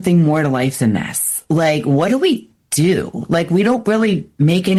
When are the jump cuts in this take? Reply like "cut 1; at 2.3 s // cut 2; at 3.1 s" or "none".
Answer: none